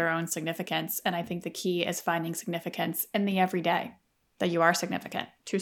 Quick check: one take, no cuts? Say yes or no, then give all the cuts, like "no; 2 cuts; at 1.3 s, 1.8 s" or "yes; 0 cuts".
no; 1 cut; at 4.0 s